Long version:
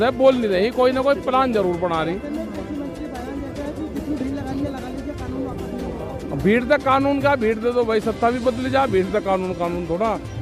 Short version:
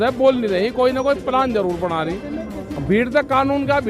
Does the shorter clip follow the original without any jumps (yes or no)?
no